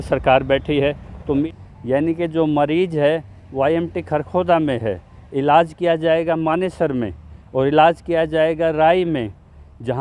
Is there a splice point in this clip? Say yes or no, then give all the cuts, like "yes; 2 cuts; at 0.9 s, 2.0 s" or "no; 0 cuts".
yes; 1 cut; at 1.4 s